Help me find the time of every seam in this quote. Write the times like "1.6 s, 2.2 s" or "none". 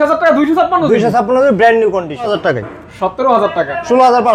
2.3 s